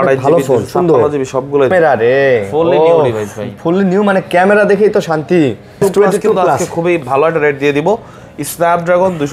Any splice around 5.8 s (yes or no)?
yes